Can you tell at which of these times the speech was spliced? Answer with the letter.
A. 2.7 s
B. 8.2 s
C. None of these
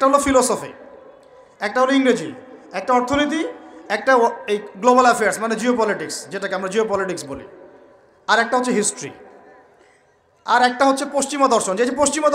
C